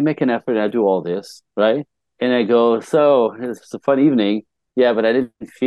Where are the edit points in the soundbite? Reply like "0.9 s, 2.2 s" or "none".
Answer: 2.0 s